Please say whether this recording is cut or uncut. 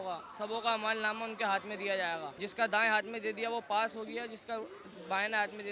cut